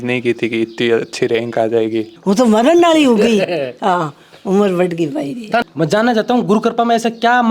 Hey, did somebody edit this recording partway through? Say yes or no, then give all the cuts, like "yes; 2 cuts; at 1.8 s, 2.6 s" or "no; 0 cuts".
yes; 2 cuts; at 2.1 s, 5.7 s